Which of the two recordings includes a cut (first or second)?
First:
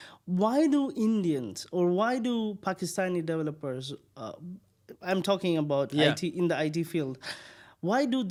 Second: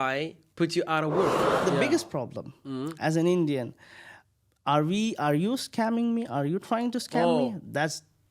second